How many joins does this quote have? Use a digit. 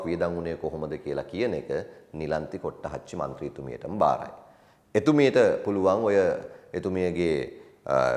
0